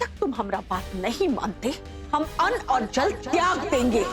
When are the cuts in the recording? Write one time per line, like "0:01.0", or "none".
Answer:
0:01.9